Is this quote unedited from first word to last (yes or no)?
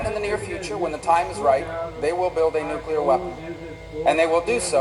yes